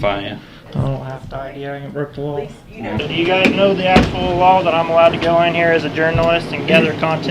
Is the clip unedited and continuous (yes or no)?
no